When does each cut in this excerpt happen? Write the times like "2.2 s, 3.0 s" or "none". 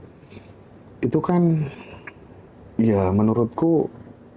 none